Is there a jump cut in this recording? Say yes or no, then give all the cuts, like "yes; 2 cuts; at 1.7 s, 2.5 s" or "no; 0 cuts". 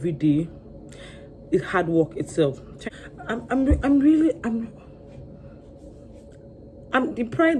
yes; 1 cut; at 2.8 s